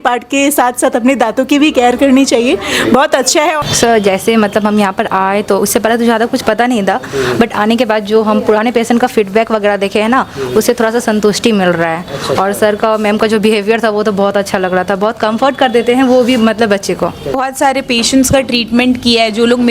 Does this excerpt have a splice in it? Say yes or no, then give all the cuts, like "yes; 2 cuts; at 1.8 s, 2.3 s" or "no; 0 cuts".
yes; 2 cuts; at 3.6 s, 17.3 s